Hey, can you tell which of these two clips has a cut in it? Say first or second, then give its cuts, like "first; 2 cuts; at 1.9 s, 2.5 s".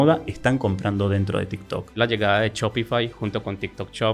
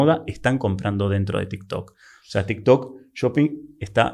first; 1 cut; at 2.0 s